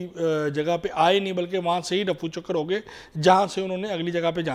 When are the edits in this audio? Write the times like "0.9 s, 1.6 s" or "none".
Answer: none